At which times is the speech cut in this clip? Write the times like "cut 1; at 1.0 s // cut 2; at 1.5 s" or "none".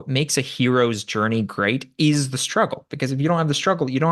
none